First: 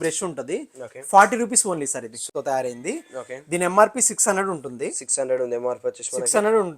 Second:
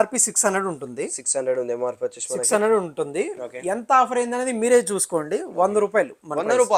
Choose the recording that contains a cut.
first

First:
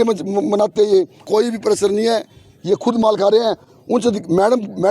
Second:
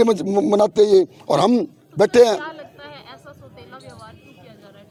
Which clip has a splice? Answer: first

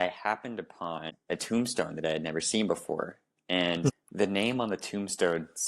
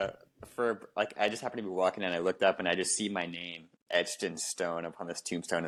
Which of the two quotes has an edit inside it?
first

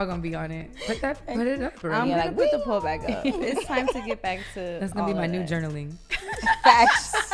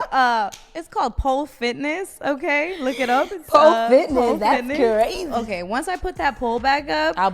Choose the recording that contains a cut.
second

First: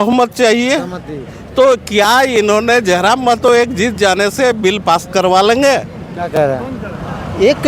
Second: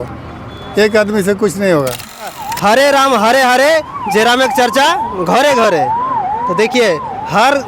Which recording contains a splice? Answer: second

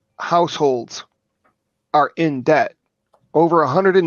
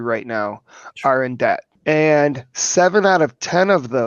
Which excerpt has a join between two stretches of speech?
second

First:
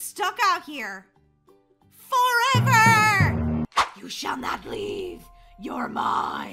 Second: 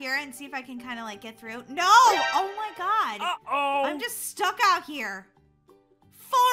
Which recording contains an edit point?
first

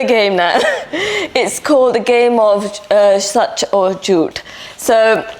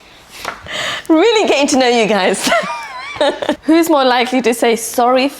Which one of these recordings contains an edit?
second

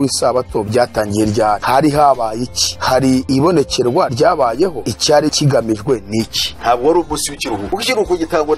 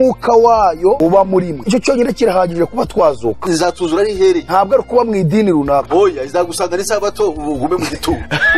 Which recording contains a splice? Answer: first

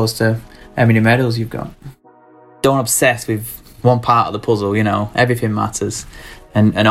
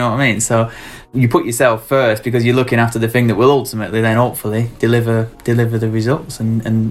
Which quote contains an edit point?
first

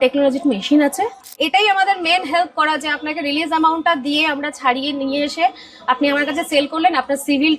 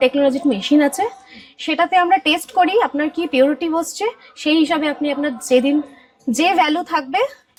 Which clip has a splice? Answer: first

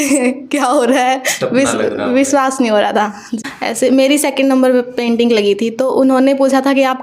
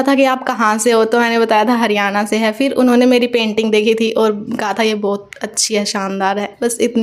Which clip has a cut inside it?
first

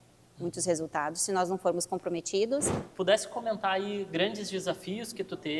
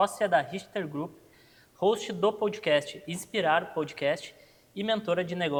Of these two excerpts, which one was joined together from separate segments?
first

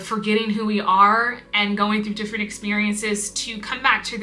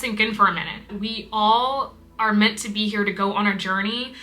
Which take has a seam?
second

